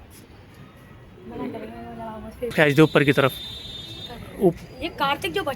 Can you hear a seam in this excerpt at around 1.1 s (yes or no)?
no